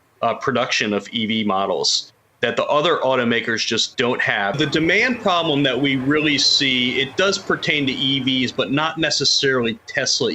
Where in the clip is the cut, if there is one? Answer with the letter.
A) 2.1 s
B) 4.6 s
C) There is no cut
B